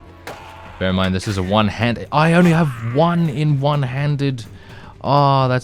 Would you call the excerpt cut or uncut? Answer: uncut